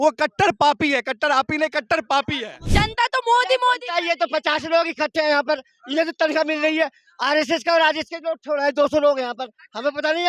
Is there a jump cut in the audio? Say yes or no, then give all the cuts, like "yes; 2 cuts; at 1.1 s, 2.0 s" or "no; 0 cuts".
yes; 1 cut; at 2.6 s